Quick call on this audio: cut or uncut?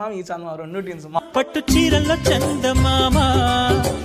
cut